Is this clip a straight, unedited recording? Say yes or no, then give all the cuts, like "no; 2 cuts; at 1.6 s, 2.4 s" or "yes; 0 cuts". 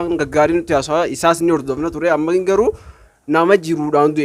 yes; 0 cuts